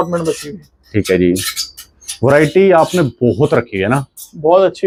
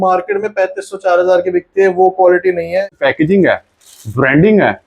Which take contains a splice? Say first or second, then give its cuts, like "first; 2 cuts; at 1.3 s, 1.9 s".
second; 1 cut; at 2.9 s